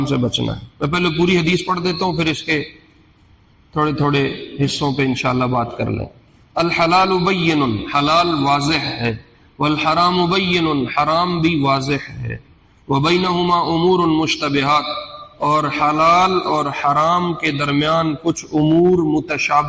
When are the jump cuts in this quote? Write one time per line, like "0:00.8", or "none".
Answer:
none